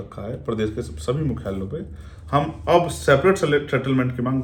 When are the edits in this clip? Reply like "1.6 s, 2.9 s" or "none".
none

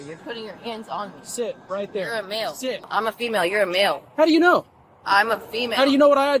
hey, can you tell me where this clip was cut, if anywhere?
2.9 s

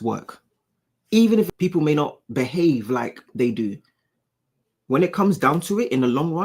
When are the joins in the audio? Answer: 1.5 s

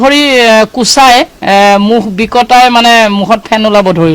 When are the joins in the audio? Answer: none

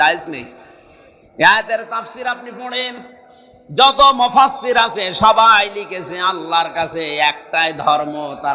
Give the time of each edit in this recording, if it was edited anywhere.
none

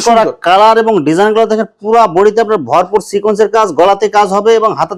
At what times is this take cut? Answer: none

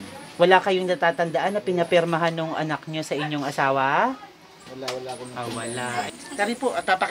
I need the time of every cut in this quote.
6.1 s

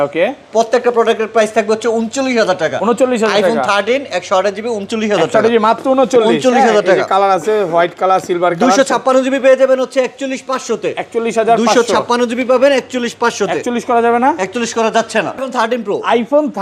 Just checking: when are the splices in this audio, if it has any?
none

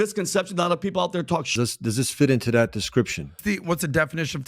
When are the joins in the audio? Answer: 1.5 s

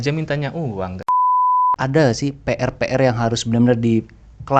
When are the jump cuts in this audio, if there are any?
1.0 s, 1.5 s

